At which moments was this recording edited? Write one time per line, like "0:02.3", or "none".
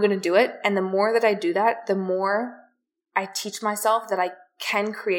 none